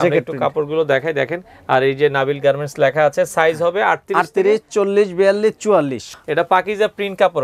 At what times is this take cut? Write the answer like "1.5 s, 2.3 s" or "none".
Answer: 6.1 s

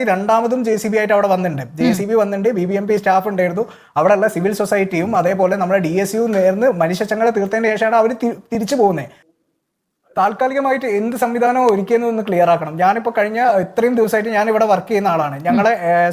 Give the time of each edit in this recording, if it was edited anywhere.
9.1 s

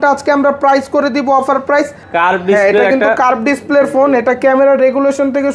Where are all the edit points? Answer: 2.0 s

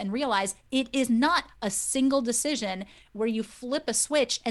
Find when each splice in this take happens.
0.9 s

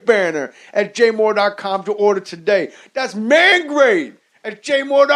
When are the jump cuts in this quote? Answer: none

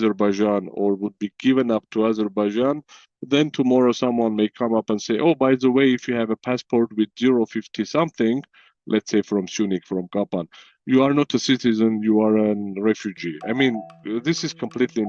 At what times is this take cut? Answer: 13.9 s

